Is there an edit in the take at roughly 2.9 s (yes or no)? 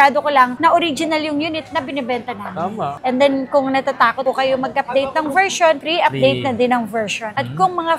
yes